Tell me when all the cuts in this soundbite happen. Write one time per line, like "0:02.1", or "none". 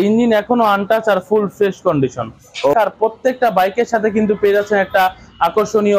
0:02.7